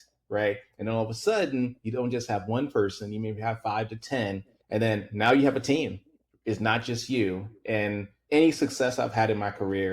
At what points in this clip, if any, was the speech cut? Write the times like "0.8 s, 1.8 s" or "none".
4.5 s, 8.1 s